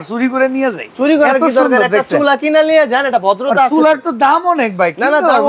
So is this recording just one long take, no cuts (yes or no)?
yes